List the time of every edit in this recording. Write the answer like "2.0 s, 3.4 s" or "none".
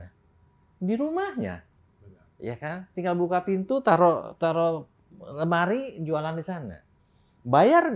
none